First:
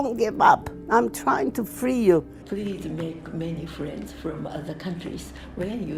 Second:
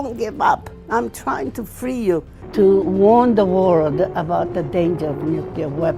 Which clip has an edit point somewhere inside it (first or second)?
first